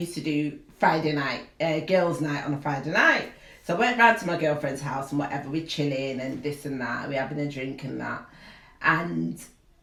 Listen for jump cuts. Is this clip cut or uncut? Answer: uncut